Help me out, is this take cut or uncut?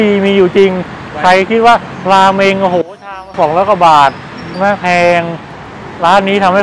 uncut